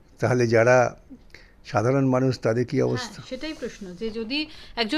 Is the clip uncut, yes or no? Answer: yes